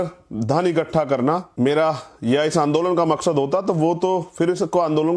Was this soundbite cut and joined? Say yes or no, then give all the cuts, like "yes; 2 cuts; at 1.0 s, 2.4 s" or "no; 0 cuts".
yes; 1 cut; at 1.5 s